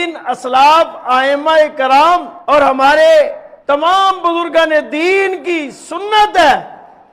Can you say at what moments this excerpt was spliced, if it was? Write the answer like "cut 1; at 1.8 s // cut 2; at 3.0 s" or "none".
cut 1; at 2.3 s // cut 2; at 3.5 s